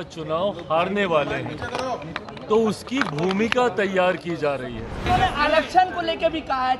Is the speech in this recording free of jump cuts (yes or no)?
no